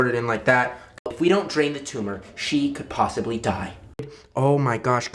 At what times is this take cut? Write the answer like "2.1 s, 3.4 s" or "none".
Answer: 1.0 s, 4.1 s

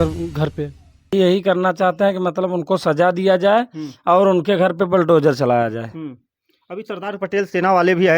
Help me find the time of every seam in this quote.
1.1 s

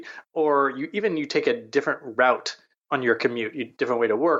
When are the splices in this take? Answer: none

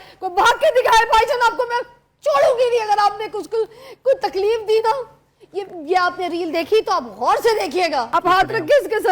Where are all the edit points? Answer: 8.1 s

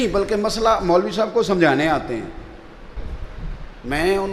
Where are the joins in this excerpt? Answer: 3.0 s

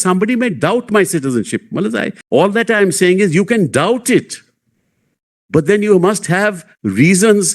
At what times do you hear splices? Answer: 2.2 s

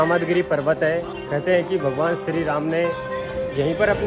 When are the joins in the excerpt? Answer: 1.1 s

